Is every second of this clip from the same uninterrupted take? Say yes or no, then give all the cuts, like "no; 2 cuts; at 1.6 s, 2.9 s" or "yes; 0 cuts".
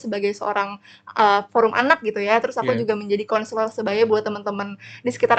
yes; 0 cuts